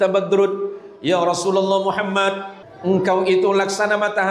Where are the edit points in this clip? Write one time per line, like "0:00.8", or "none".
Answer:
0:02.5